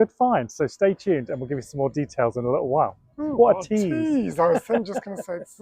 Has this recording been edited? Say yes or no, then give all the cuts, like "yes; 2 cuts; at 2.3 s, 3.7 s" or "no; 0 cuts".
no; 0 cuts